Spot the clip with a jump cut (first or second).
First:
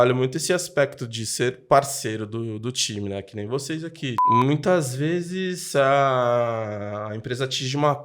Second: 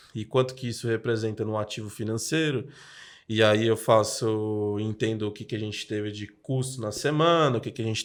first